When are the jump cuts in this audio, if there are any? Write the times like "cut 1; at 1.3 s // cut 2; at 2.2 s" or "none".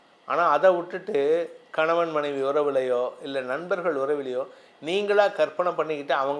none